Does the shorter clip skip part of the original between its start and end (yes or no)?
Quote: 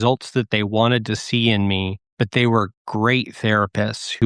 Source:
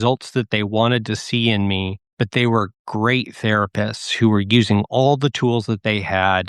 no